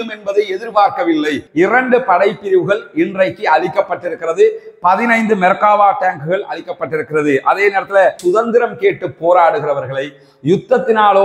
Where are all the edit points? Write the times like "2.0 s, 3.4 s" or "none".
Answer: 1.4 s, 8.2 s